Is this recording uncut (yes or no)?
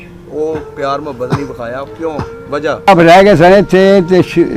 no